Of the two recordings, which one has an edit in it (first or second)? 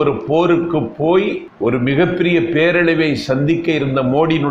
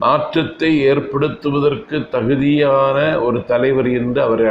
first